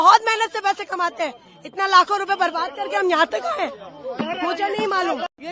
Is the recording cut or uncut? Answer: uncut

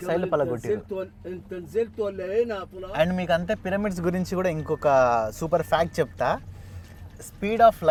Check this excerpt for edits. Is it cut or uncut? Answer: uncut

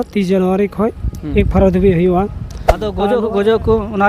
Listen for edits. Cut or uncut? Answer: cut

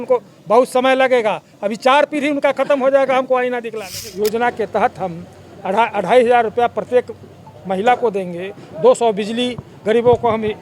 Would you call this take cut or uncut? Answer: cut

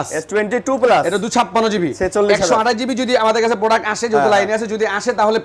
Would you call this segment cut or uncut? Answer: uncut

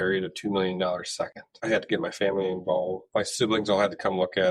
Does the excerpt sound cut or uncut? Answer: cut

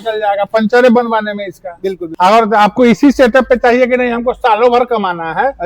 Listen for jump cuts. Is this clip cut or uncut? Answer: cut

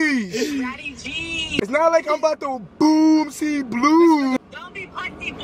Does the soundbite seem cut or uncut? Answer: cut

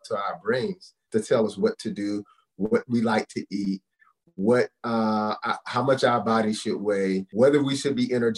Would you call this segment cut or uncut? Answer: cut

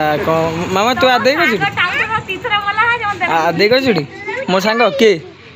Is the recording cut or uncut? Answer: uncut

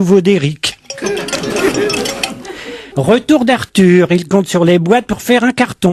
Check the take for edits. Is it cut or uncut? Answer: uncut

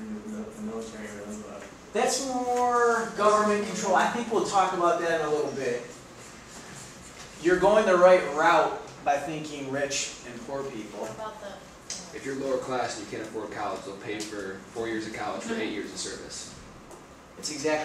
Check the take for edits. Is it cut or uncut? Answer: cut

